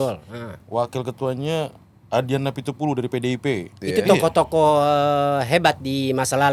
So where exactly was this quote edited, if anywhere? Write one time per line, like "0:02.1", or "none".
0:03.8